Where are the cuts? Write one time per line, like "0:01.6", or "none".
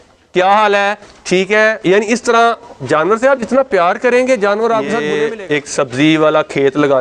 0:05.1